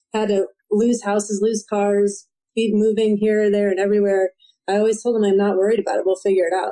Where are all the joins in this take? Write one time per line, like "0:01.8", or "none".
none